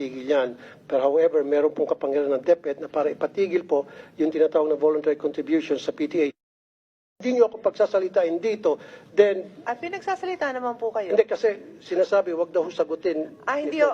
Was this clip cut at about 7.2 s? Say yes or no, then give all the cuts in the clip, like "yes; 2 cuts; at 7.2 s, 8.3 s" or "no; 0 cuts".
yes; 1 cut; at 7.2 s